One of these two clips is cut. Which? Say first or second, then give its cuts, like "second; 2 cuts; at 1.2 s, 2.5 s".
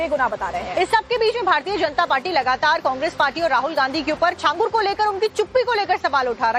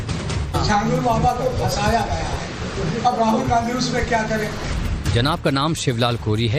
first; 1 cut; at 2.1 s